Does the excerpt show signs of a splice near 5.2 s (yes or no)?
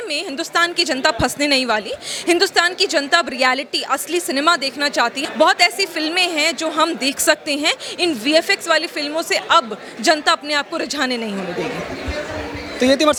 no